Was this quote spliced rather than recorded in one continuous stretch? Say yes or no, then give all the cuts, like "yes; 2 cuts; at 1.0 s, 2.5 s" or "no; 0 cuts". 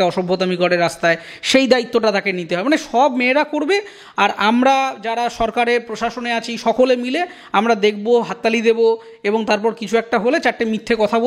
no; 0 cuts